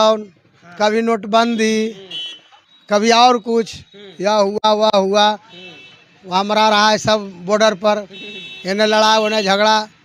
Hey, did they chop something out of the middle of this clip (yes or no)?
no